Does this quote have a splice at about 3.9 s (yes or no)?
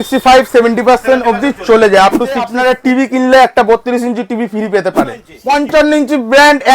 no